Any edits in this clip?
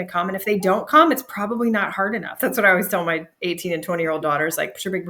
yes; 1 cut; at 2.4 s

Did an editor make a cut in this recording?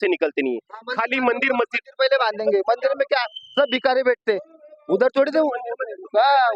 no; 0 cuts

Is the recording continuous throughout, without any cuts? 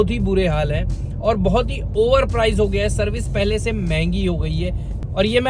yes; 0 cuts

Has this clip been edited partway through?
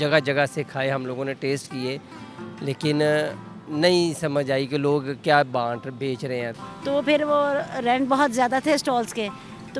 yes; 1 cut; at 6.6 s

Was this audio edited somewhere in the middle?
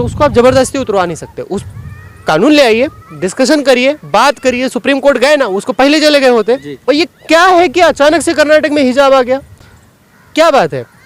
no; 0 cuts

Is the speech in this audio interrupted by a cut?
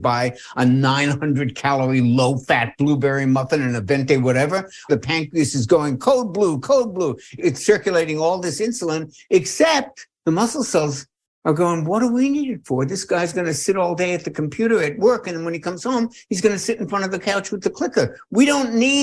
yes; 3 cuts; at 4.9 s, 7.3 s, 10.0 s

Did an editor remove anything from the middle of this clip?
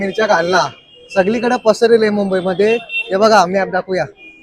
no; 0 cuts

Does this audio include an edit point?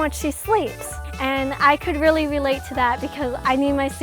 yes; 1 cut; at 1.0 s

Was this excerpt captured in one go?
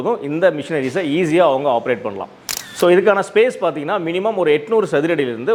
yes; 0 cuts

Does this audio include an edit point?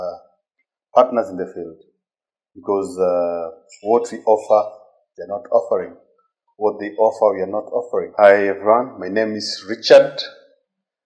yes; 1 cut; at 8.1 s

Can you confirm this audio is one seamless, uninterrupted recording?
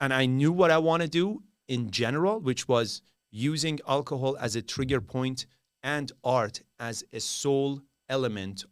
yes; 0 cuts

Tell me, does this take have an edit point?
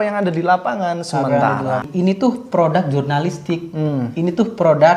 yes; 1 cut; at 1.8 s

